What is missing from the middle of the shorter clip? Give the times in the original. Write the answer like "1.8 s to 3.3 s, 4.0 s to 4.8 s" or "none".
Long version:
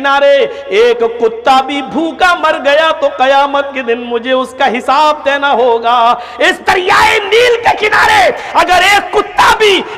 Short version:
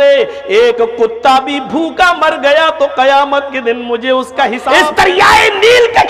4.8 s to 6.3 s